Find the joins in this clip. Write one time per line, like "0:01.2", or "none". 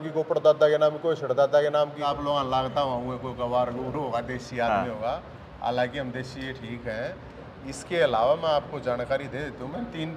0:02.1

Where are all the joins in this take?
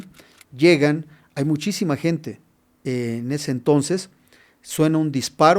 none

